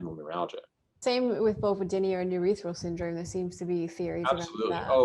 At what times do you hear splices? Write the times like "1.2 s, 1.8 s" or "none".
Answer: 1.0 s